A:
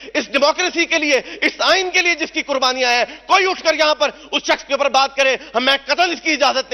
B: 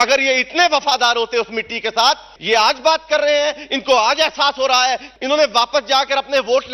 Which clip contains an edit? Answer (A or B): B